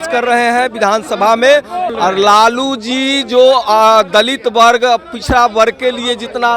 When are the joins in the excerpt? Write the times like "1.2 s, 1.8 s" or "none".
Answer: 1.9 s